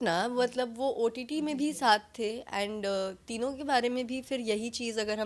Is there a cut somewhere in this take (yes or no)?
no